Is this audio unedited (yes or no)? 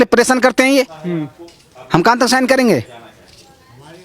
yes